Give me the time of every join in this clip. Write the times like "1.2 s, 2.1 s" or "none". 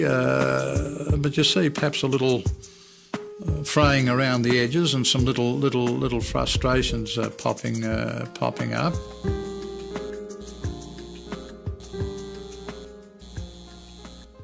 none